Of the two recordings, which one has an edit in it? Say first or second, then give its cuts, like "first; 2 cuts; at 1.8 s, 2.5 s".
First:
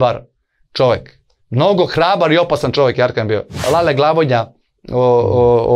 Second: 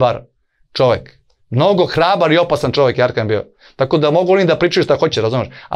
first; 1 cut; at 3.7 s